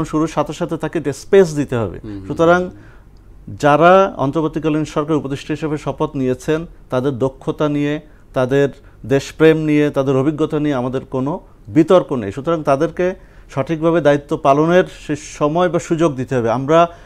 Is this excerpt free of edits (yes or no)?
yes